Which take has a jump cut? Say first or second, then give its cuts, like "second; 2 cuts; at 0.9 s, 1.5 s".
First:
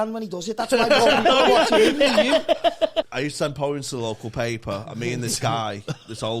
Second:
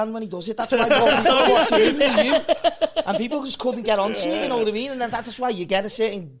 first; 1 cut; at 3.1 s